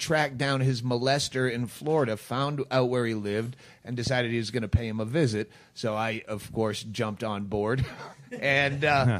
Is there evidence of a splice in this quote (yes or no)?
yes